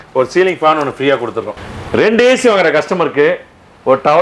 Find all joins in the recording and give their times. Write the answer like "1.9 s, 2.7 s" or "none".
1.5 s